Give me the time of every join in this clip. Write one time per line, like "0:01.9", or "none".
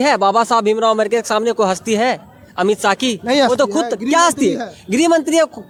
none